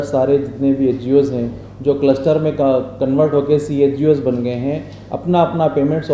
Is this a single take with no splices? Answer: yes; 0 cuts

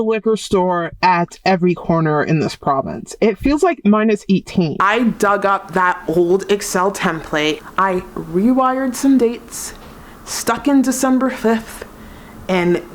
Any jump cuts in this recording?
yes; 2 cuts; at 4.7 s, 7.7 s

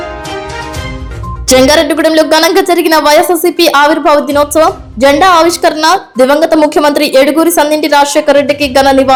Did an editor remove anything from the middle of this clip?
no; 0 cuts

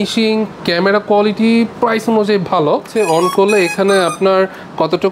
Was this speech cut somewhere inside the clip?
yes; 1 cut; at 2.9 s

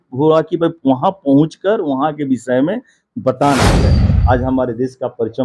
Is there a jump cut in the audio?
yes; 1 cut; at 3.9 s

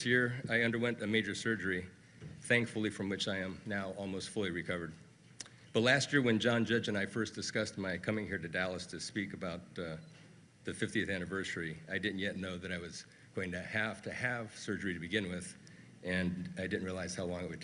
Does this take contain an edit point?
yes; 1 cut; at 8.5 s

